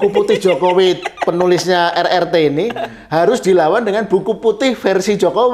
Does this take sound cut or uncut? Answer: uncut